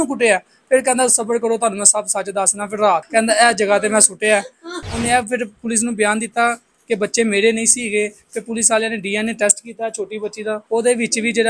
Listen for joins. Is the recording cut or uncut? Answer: cut